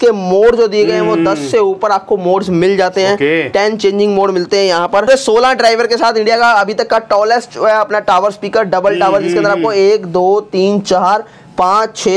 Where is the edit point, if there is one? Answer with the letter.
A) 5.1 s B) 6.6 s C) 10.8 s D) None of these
A